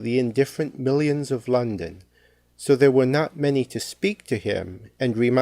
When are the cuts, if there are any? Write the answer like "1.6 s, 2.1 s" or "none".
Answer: 3.9 s